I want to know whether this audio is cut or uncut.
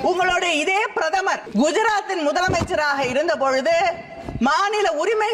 cut